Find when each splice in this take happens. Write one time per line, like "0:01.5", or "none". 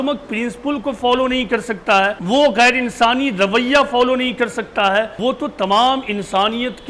0:02.2
0:05.1